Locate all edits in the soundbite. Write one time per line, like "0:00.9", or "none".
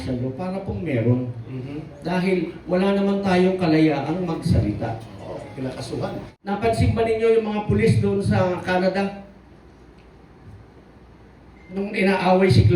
0:06.3